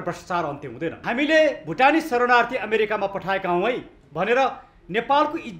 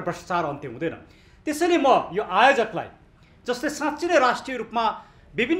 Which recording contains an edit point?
first; 1 cut; at 1.0 s

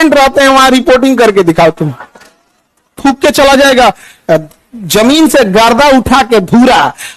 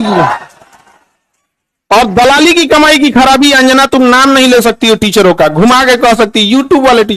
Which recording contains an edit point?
first; 1 cut; at 3.0 s

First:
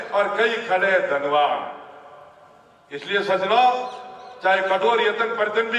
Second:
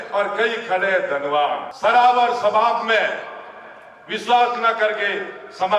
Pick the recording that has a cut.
second; 1 cut; at 1.7 s

